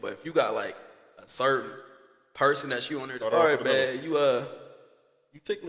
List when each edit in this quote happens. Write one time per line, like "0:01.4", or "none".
0:03.1